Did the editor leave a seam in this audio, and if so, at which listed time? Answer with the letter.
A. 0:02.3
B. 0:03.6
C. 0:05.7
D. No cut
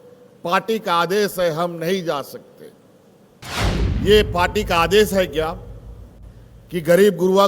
B